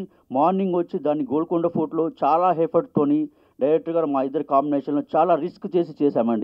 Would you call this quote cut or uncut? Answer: uncut